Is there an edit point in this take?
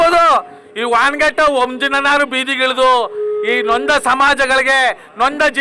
no; 0 cuts

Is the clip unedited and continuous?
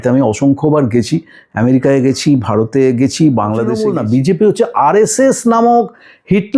no; 1 cut; at 3.8 s

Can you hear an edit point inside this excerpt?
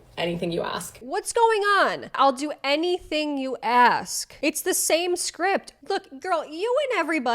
yes; 2 cuts; at 0.9 s, 5.7 s

